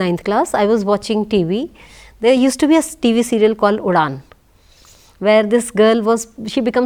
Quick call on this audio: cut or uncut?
uncut